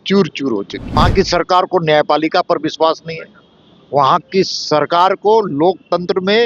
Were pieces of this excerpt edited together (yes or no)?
yes